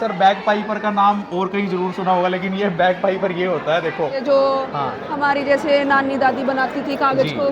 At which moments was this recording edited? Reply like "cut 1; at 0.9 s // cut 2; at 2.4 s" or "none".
cut 1; at 4.2 s